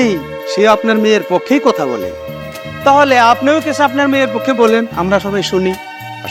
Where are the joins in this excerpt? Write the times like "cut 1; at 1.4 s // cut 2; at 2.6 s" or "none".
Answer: none